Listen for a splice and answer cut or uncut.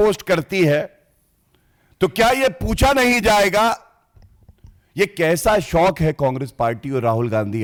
uncut